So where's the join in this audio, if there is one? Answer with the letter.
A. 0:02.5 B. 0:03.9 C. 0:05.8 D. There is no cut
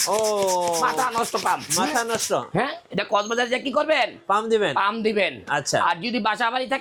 D